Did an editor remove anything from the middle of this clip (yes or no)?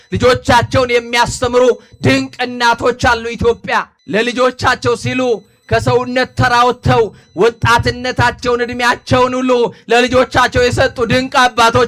yes